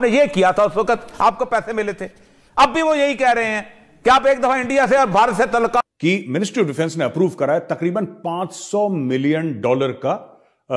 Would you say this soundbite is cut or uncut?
cut